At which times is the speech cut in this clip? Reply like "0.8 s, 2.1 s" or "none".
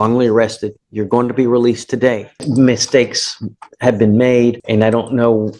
2.4 s, 4.6 s